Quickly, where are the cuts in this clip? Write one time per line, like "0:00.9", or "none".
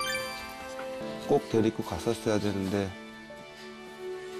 0:01.0